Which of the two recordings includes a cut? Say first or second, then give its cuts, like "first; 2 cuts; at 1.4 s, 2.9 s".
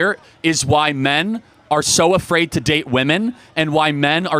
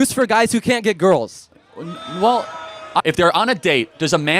second; 1 cut; at 3.0 s